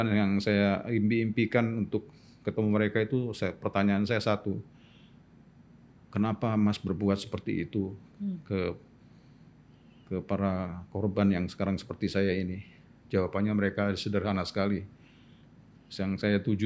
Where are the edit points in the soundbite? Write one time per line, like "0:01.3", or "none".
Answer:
none